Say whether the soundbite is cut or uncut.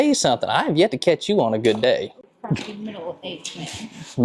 cut